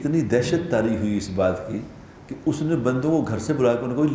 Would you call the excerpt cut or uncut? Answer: uncut